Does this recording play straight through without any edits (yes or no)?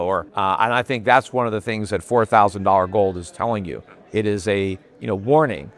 yes